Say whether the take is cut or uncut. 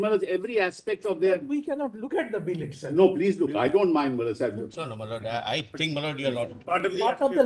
uncut